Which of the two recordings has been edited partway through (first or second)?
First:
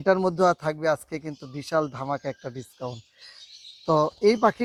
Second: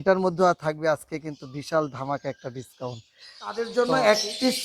second